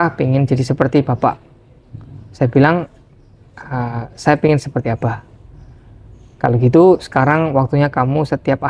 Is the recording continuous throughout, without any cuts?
yes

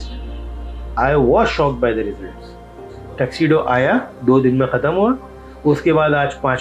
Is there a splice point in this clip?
no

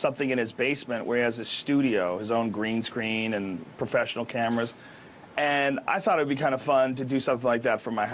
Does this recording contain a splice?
yes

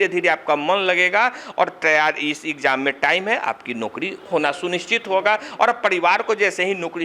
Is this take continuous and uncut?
no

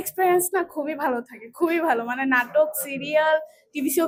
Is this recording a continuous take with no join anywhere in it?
yes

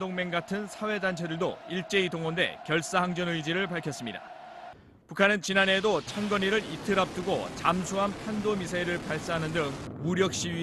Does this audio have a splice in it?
yes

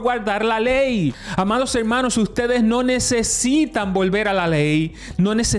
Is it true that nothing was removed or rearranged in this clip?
no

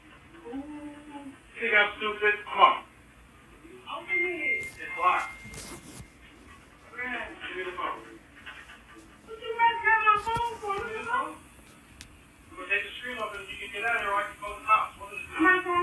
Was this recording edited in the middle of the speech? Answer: yes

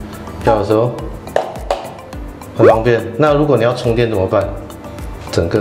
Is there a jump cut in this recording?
no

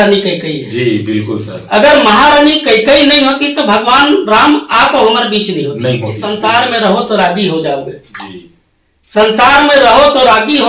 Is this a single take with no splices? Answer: no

